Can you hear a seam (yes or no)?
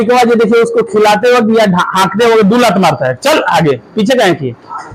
no